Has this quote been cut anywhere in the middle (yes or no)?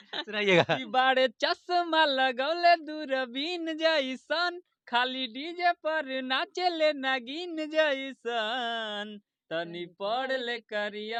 no